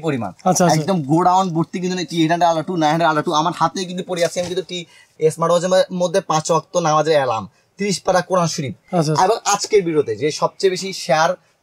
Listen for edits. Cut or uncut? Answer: cut